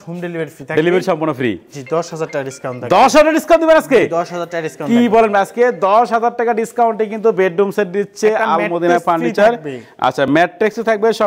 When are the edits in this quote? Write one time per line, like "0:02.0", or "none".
none